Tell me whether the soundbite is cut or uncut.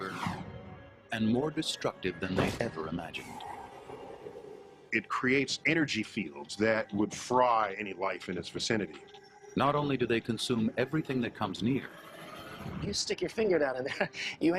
uncut